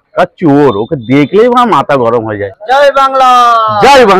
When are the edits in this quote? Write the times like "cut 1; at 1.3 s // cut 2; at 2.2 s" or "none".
none